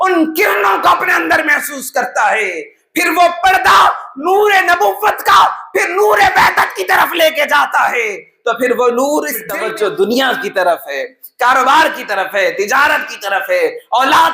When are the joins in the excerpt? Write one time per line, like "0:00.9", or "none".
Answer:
0:09.4